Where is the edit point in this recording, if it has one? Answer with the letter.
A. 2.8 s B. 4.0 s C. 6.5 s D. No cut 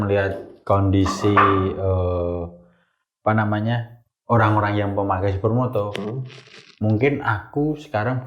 D